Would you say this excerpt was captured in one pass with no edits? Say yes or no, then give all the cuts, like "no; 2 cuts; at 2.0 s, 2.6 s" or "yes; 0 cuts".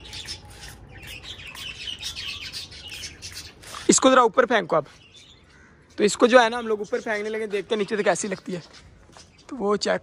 yes; 0 cuts